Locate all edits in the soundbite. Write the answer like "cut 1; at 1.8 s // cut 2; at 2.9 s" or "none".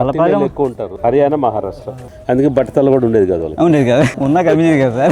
cut 1; at 0.9 s // cut 2; at 4.2 s